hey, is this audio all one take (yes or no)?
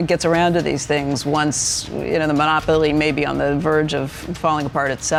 yes